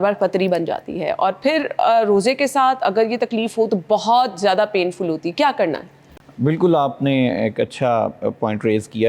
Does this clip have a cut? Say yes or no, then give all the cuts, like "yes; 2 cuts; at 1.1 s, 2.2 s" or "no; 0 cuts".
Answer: no; 0 cuts